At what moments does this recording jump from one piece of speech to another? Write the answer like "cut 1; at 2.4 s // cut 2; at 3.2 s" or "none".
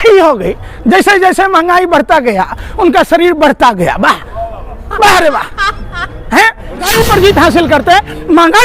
cut 1; at 6.9 s